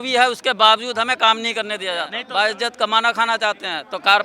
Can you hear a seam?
yes; 1 cut; at 2.2 s

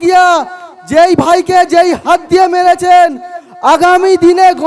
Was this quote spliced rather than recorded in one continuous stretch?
no; 0 cuts

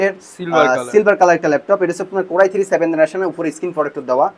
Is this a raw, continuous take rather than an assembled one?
yes; 0 cuts

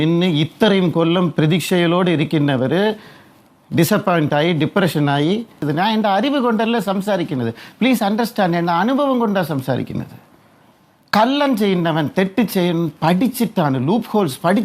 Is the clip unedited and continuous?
no; 1 cut; at 5.7 s

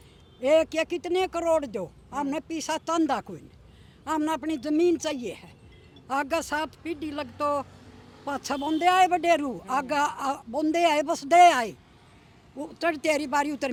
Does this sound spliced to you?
no; 0 cuts

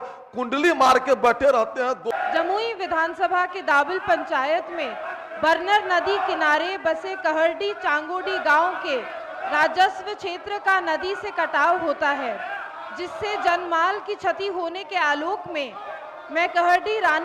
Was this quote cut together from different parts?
yes; 1 cut; at 2.1 s

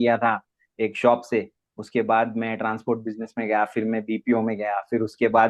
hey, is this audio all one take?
yes; 0 cuts

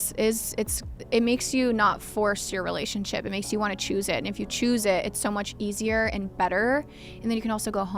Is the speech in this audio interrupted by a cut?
no; 0 cuts

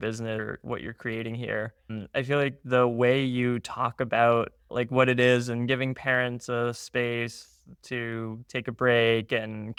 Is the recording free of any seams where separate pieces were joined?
yes; 0 cuts

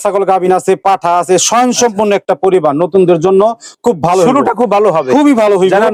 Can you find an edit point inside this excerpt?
no; 0 cuts

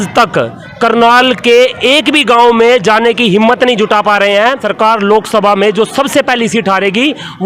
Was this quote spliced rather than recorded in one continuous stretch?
yes; 1 cut; at 4.7 s

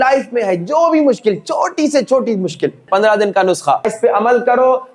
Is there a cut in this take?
yes; 2 cuts; at 2.9 s, 3.9 s

